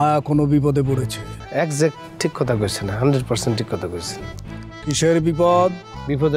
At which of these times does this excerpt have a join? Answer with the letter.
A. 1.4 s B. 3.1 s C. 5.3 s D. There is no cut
A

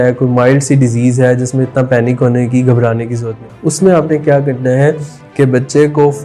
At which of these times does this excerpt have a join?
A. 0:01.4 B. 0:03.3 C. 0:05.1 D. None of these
B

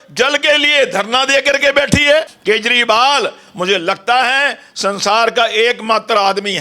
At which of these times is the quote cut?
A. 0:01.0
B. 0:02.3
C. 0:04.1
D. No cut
B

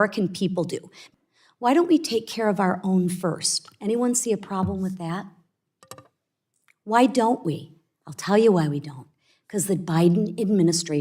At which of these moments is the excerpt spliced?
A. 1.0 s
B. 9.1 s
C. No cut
A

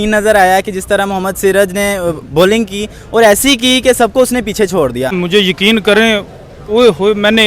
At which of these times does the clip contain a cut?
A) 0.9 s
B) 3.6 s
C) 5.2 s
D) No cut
C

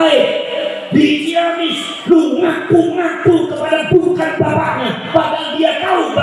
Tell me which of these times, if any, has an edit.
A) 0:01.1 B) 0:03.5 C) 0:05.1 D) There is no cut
D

